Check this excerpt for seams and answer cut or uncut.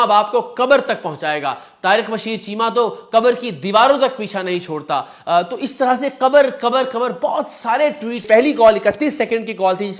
cut